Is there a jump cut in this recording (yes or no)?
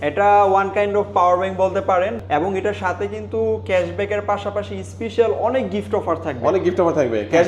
yes